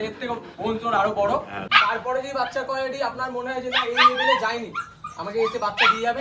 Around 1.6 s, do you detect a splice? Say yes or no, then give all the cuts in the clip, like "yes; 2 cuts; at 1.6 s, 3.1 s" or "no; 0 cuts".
yes; 1 cut; at 1.6 s